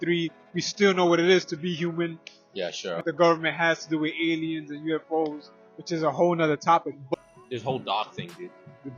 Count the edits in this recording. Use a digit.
2